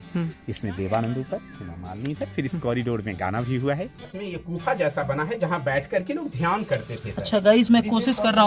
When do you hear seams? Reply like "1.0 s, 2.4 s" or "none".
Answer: 4.1 s